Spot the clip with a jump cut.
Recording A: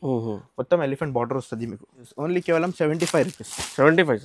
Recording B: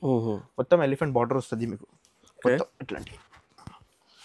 A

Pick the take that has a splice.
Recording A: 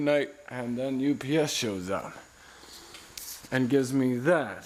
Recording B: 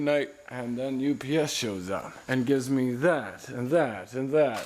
B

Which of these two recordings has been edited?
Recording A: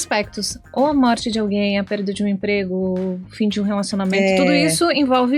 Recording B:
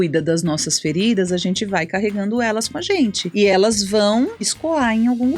B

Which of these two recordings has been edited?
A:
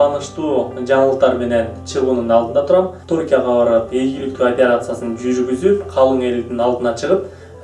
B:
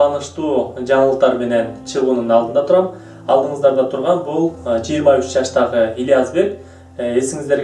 A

